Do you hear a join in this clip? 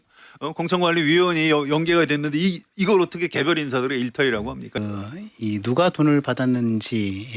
yes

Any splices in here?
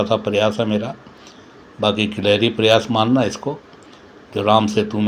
no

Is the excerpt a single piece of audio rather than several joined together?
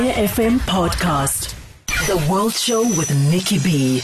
no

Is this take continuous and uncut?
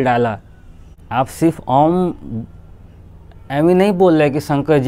no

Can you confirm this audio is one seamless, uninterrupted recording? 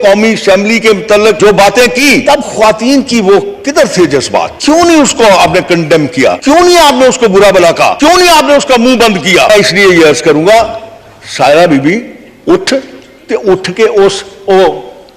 no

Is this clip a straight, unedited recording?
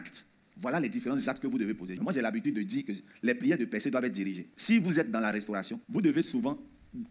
no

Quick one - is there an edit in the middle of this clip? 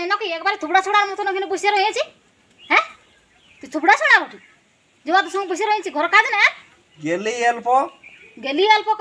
no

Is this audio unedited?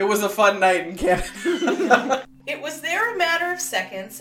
no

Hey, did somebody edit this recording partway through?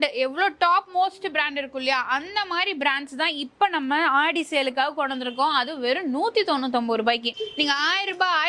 no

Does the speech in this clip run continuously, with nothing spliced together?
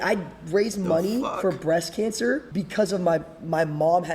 no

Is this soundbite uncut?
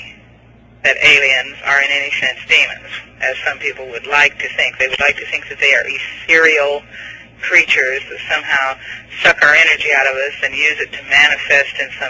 yes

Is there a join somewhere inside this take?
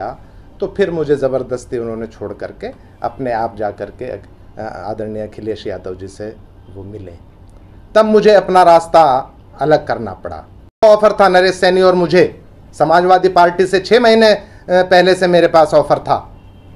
yes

